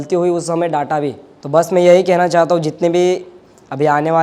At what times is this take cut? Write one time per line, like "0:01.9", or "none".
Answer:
0:01.3